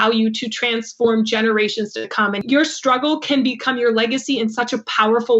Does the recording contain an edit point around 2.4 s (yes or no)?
yes